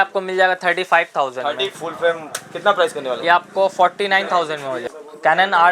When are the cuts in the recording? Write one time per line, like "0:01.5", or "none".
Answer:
0:01.7
0:04.8